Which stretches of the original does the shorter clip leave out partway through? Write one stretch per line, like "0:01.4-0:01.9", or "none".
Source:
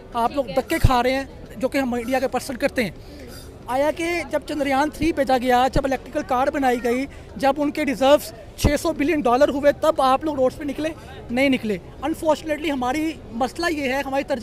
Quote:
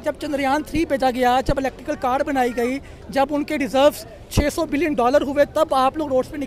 none